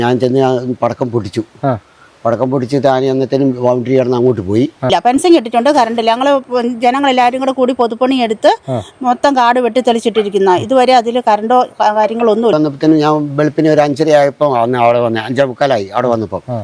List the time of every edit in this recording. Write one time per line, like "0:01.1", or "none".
0:04.9
0:12.5